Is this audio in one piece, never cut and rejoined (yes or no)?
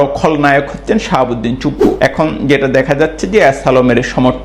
no